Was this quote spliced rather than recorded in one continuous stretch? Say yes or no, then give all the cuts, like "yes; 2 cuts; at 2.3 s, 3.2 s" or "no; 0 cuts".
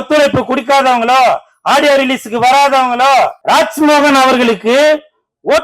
yes; 1 cut; at 3.4 s